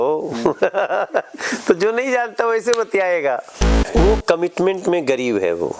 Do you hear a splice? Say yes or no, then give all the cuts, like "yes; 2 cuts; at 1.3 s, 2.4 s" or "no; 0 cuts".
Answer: yes; 1 cut; at 3.7 s